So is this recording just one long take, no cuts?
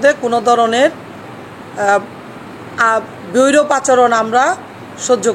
yes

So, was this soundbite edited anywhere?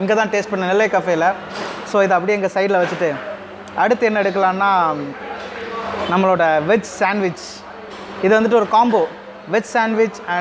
no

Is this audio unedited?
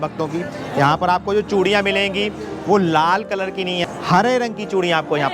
no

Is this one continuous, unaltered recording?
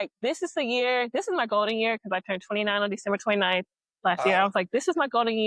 yes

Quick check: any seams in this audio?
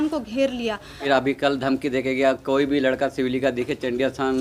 yes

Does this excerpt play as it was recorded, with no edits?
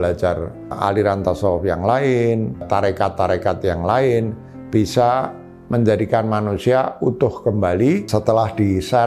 no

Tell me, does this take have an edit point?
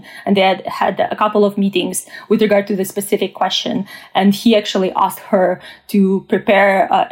no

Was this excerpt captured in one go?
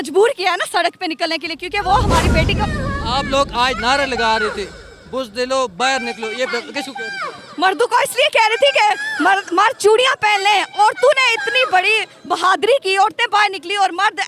no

